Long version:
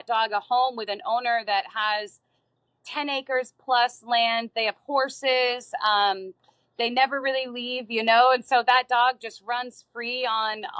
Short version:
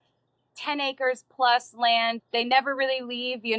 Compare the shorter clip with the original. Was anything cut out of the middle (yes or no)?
yes